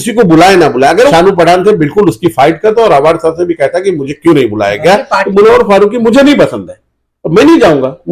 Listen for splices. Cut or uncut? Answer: cut